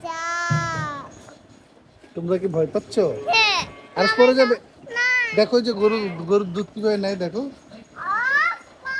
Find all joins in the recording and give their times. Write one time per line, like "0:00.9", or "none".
none